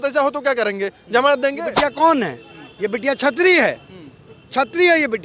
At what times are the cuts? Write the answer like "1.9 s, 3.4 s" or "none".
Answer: 1.6 s